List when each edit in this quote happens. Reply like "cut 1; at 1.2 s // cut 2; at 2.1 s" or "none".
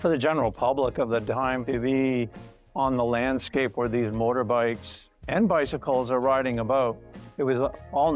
cut 1; at 1.6 s